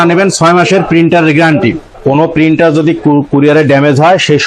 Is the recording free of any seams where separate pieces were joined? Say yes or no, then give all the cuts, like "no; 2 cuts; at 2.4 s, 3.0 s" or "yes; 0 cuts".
no; 1 cut; at 1.9 s